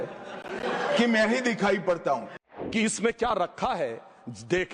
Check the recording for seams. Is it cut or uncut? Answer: cut